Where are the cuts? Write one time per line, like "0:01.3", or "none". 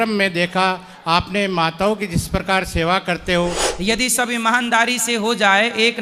0:03.7